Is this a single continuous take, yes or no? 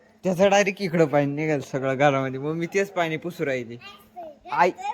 yes